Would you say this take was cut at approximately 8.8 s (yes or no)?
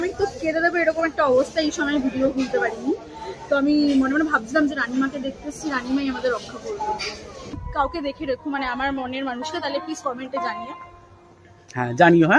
no